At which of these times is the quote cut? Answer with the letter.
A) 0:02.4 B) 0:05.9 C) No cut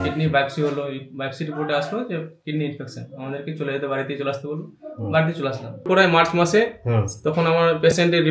B